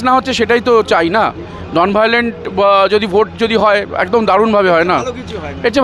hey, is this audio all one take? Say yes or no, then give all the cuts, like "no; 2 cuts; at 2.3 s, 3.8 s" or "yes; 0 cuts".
yes; 0 cuts